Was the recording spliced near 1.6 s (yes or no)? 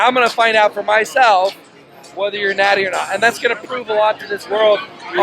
yes